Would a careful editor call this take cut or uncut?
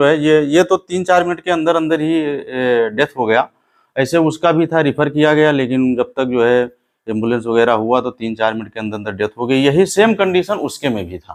uncut